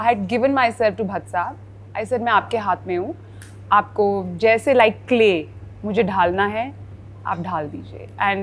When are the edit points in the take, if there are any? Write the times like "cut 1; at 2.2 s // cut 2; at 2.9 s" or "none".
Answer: none